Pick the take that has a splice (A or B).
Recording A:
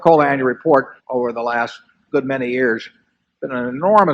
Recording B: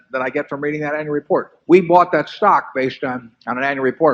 A